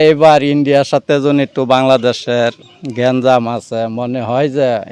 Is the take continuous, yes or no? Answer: yes